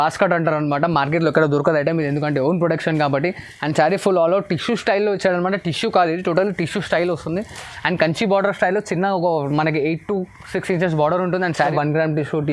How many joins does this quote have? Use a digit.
1